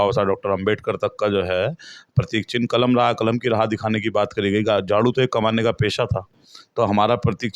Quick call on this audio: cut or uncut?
uncut